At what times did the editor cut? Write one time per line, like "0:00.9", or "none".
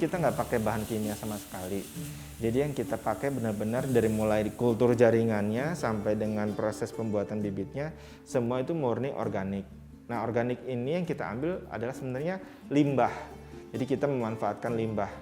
none